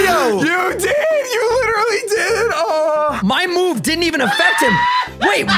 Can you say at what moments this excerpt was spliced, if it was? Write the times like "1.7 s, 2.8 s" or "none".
3.1 s

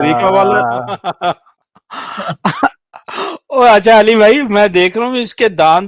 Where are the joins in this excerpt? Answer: 0.9 s

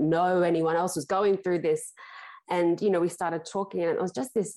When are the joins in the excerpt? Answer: none

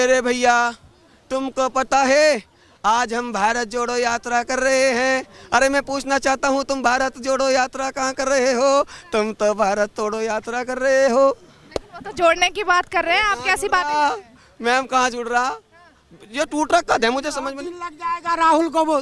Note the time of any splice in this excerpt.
none

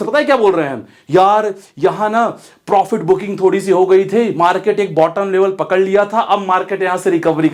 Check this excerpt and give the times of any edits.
none

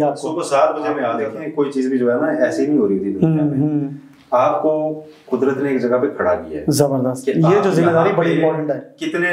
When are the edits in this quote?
1.2 s

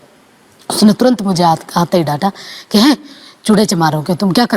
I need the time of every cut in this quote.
none

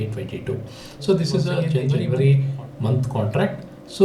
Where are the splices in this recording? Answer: 2.0 s

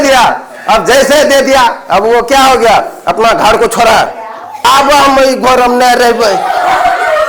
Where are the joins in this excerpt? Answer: 4.6 s

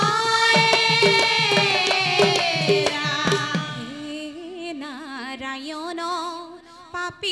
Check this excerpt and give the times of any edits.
3.8 s

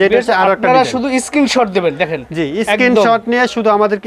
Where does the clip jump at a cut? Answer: none

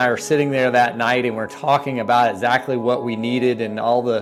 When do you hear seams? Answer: none

